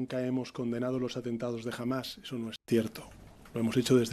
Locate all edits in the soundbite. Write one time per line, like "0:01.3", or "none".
none

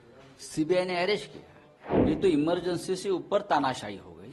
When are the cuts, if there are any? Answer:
none

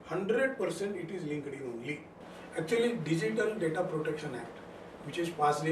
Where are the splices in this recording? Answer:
0:02.3

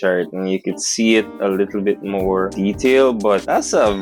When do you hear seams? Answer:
none

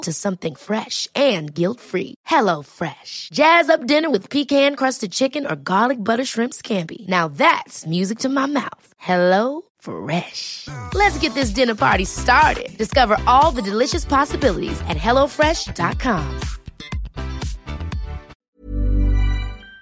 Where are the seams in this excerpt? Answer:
0:18.3

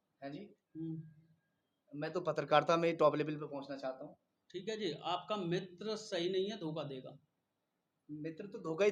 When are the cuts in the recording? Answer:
none

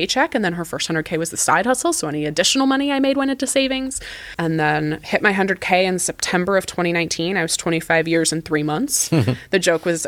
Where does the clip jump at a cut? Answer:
0:04.2

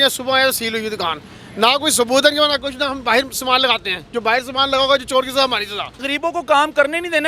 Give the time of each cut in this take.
0:06.0

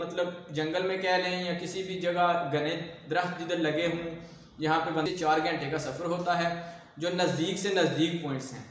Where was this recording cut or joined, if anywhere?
0:05.1

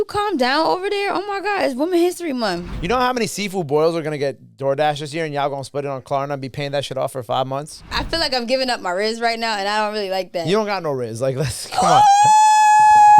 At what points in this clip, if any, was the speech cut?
0:02.7
0:07.9

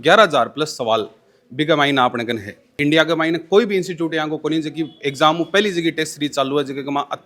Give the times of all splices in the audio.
none

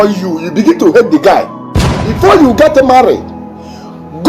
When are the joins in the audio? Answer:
0:02.1

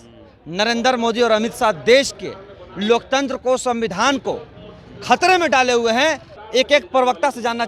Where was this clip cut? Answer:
0:06.3

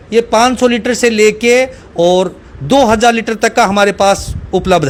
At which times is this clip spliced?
none

